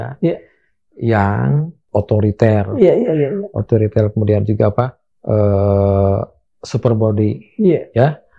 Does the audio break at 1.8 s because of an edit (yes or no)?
yes